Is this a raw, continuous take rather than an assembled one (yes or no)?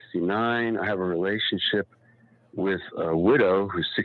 no